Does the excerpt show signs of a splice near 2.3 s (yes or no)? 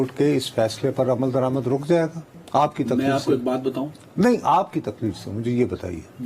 no